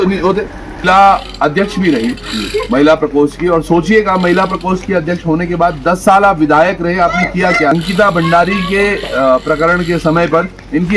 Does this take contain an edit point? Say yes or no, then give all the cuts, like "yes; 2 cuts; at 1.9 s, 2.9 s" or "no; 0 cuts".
yes; 2 cuts; at 0.8 s, 7.7 s